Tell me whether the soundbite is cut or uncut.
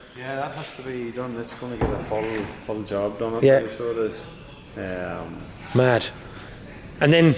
uncut